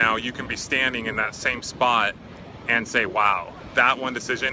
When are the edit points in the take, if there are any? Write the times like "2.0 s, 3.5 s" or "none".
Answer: 3.5 s